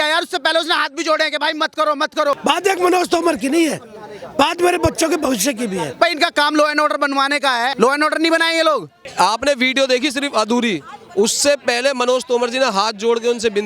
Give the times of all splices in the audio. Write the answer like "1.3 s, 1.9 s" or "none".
2.4 s, 5.9 s, 7.7 s, 9.0 s